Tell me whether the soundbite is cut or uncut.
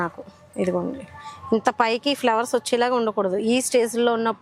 uncut